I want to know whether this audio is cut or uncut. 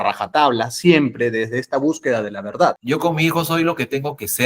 cut